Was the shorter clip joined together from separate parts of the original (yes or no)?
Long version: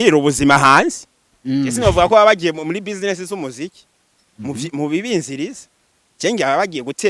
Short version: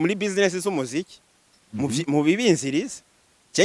no